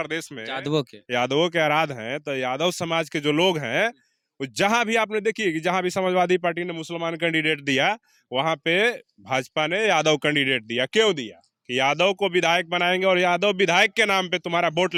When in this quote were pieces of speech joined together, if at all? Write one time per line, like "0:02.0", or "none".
none